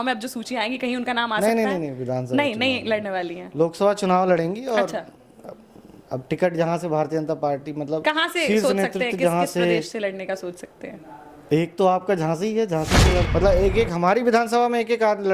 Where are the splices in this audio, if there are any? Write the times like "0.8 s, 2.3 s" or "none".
13.3 s

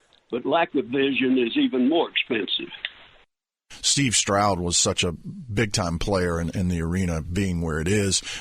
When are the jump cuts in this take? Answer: 3.6 s

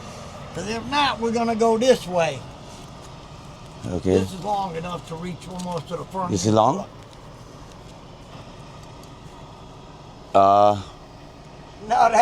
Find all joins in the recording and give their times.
8.4 s

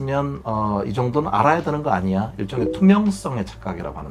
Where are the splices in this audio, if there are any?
none

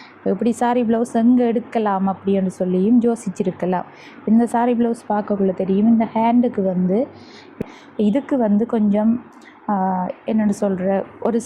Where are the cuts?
7.6 s

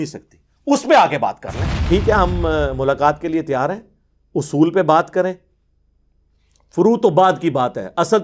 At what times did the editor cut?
1.8 s

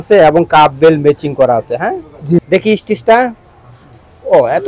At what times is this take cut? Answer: 2.4 s

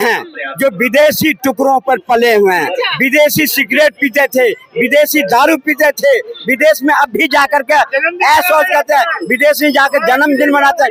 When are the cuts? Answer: none

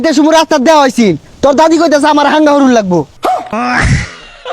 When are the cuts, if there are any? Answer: 3.3 s

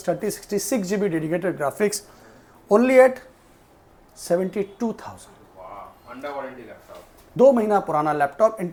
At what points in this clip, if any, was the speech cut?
none

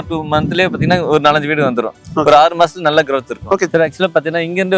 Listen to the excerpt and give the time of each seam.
3.7 s

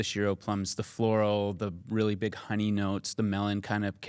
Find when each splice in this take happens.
none

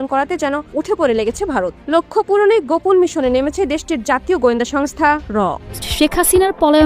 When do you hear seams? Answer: 5.9 s

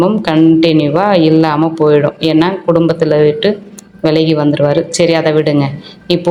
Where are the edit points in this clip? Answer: none

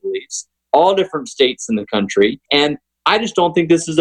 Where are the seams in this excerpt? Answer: 2.4 s

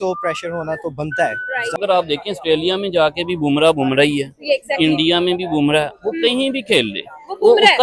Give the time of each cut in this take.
1.8 s

